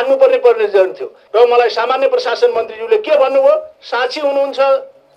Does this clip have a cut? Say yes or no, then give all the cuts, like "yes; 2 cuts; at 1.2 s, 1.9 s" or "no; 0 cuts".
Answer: yes; 1 cut; at 1.1 s